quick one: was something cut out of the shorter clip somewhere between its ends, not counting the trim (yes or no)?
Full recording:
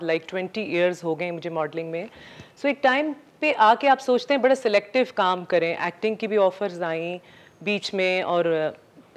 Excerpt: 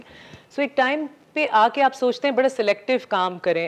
no